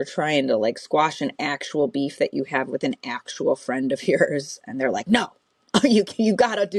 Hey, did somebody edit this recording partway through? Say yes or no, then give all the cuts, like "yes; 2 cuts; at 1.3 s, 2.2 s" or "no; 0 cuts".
no; 0 cuts